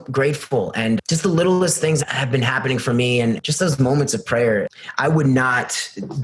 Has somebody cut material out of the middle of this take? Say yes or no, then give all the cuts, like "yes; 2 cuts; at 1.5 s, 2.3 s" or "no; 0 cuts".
yes; 4 cuts; at 1.0 s, 2.0 s, 3.4 s, 4.7 s